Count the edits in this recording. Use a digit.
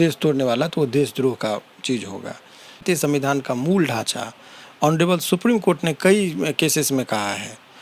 1